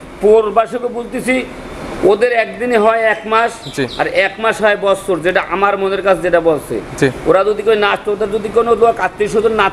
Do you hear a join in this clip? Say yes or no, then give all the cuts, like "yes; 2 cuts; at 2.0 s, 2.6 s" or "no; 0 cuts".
no; 0 cuts